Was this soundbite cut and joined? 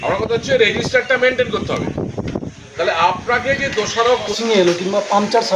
yes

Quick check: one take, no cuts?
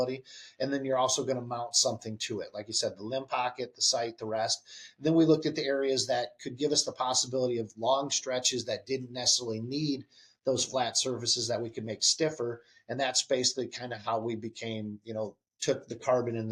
yes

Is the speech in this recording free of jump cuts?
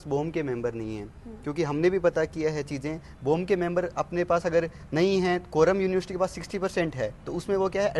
yes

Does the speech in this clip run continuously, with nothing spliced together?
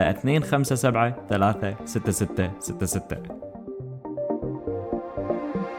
no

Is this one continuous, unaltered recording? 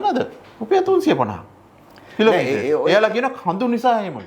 yes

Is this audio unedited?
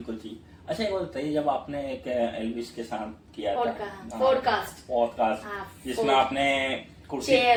yes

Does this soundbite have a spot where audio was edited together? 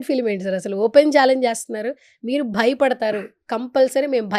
no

